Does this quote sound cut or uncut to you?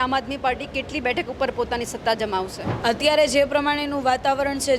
cut